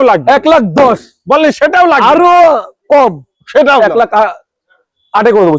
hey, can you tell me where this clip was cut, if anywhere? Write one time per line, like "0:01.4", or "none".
none